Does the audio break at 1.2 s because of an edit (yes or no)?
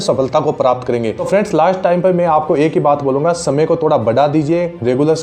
yes